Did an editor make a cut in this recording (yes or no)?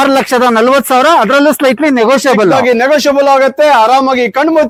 no